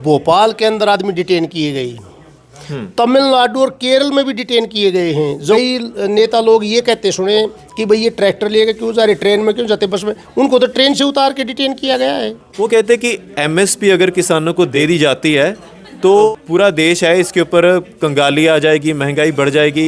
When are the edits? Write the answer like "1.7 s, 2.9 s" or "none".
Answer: 5.5 s, 12.4 s, 14.7 s, 16.3 s